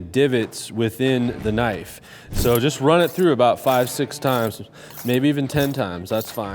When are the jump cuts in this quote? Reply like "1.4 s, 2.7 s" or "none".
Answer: 2.2 s